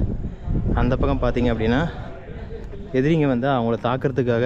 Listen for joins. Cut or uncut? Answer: uncut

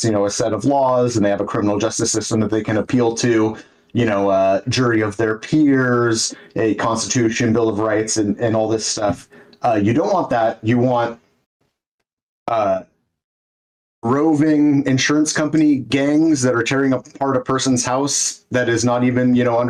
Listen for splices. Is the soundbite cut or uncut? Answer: uncut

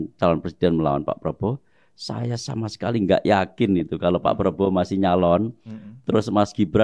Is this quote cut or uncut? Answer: uncut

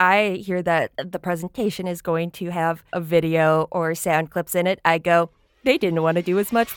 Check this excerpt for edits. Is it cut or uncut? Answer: cut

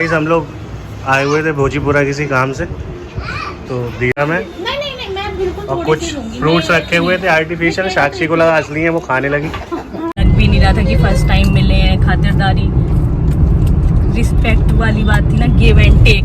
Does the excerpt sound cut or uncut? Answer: cut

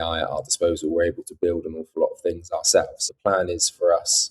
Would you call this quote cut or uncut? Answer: cut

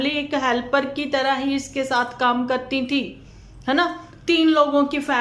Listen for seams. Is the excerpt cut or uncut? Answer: uncut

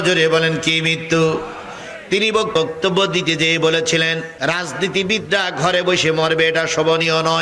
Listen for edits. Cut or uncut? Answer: cut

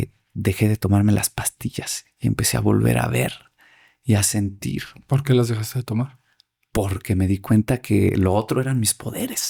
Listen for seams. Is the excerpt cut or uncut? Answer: uncut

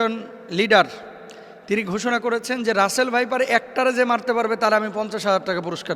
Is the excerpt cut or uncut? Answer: uncut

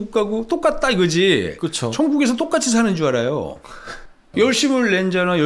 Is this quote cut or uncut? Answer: cut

